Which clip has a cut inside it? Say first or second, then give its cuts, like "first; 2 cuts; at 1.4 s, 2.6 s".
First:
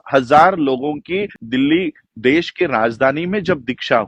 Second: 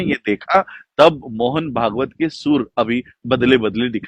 first; 1 cut; at 1.4 s